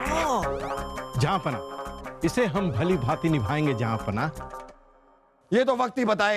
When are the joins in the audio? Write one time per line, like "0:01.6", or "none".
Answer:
none